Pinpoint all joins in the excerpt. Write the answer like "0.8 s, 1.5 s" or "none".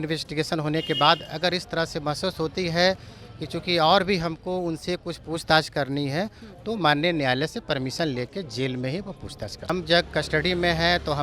9.7 s

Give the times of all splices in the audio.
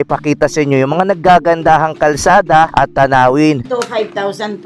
2.7 s, 3.6 s

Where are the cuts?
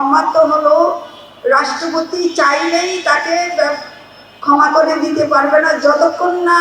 none

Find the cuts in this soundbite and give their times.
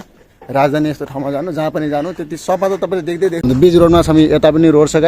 3.4 s

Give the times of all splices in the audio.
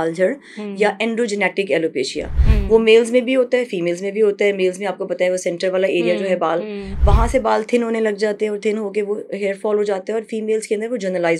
none

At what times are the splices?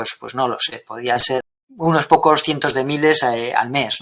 1.6 s

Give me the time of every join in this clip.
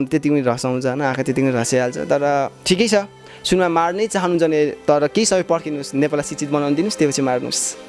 none

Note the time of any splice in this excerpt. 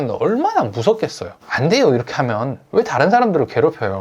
1.3 s

